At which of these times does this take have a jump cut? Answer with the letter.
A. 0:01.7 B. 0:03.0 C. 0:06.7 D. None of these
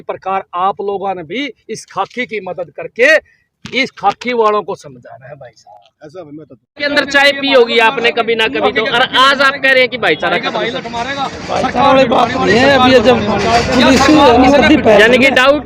C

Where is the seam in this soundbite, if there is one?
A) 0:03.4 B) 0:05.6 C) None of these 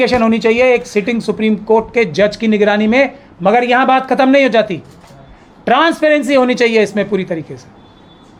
C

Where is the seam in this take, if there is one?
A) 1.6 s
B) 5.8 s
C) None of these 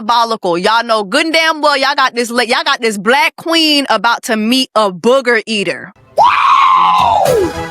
B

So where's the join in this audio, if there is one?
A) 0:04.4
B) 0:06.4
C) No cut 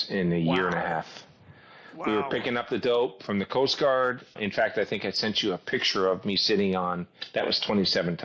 A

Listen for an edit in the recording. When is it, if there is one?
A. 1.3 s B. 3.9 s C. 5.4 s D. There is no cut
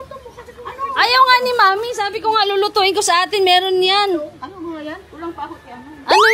D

